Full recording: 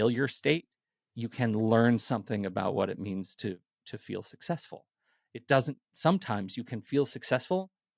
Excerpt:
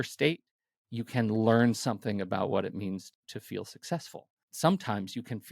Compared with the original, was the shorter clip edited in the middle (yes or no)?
yes